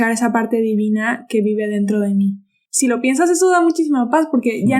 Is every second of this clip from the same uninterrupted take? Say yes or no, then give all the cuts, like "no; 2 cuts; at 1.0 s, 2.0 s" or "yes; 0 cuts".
no; 1 cut; at 2.6 s